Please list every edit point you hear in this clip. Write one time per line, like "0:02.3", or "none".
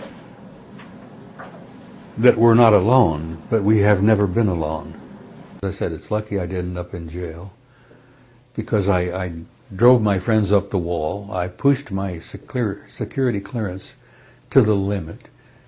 0:05.6